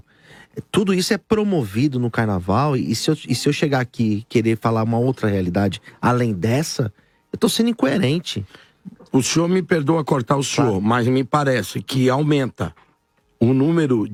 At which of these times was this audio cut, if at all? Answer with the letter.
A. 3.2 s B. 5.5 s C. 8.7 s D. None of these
D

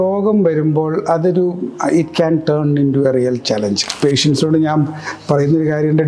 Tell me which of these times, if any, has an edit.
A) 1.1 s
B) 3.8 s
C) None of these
B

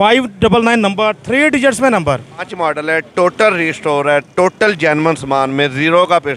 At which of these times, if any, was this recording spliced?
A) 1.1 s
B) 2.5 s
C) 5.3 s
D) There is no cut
B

